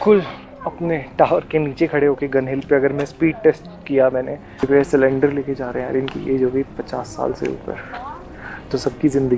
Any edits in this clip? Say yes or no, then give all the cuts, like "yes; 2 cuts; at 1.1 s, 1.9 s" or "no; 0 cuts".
yes; 1 cut; at 4.4 s